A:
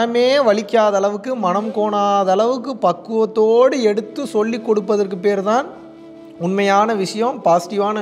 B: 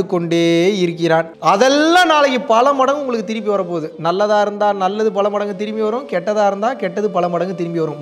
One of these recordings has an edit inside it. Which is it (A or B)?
B